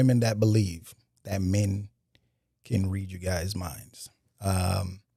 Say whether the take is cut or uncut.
uncut